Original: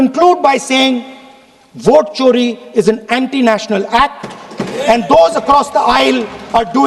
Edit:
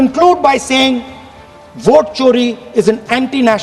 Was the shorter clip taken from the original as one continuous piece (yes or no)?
yes